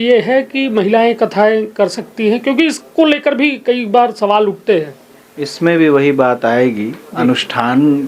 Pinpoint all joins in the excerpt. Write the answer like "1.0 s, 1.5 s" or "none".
none

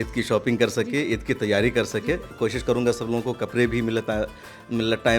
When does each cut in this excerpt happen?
2.3 s

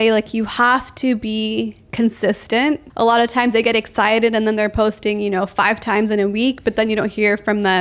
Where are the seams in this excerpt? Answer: 2.9 s

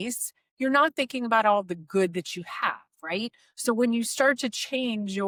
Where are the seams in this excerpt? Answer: none

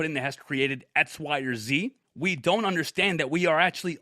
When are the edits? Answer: 2.0 s

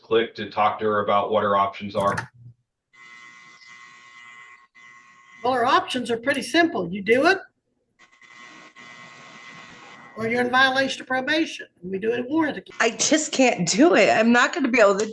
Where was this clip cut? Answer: 12.7 s

